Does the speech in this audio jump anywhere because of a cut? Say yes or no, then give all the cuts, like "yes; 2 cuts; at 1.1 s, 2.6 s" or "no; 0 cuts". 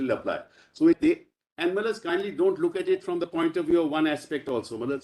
yes; 1 cut; at 1.0 s